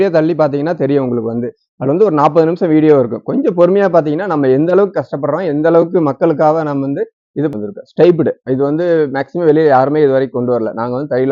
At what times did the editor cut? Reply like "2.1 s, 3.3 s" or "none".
7.5 s